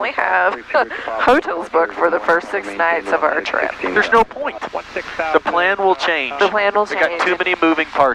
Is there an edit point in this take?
no; 0 cuts

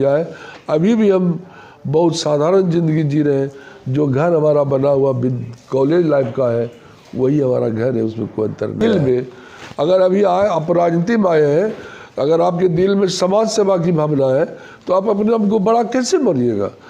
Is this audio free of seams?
no; 1 cut; at 8.8 s

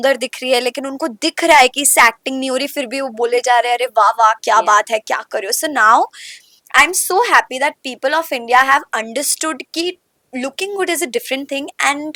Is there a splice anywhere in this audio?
no; 0 cuts

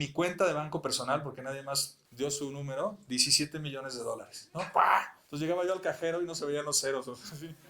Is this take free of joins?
no; 2 cuts; at 2.0 s, 5.2 s

